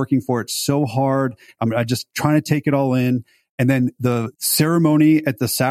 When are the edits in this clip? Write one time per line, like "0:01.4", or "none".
0:01.5
0:04.0

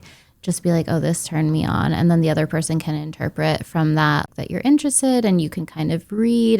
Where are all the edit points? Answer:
0:04.3

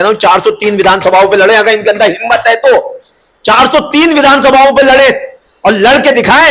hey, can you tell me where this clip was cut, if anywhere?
none

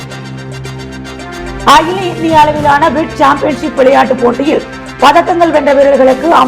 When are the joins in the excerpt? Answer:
none

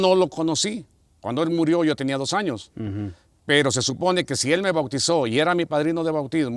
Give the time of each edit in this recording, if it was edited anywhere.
none

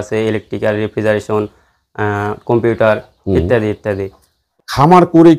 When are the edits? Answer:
0:04.2

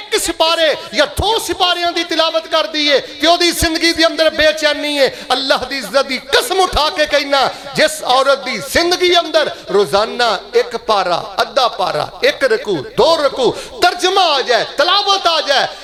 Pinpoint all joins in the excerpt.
none

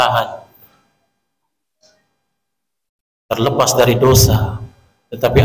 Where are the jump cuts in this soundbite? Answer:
none

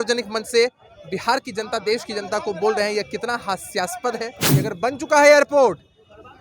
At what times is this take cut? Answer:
0:04.4

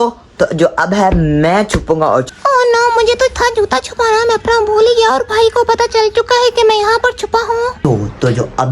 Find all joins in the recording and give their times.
0:02.3
0:07.8

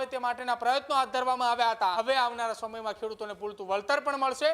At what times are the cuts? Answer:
0:01.9

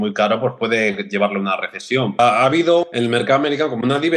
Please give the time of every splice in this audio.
0:02.2
0:02.9

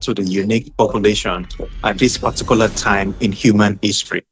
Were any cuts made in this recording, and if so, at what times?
0:03.1

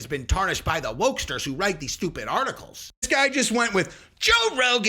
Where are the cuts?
0:03.0

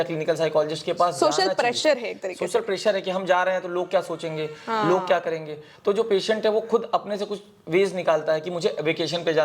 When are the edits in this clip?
none

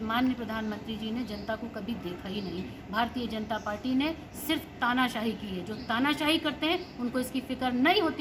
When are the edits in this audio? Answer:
none

